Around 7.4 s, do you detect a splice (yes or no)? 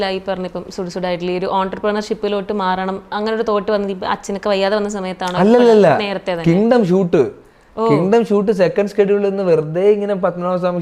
no